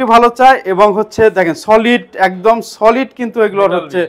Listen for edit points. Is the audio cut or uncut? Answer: uncut